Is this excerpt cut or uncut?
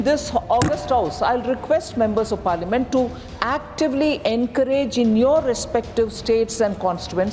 uncut